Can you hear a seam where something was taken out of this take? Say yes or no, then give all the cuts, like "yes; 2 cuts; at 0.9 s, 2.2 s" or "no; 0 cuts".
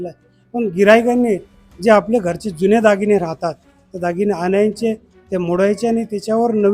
no; 0 cuts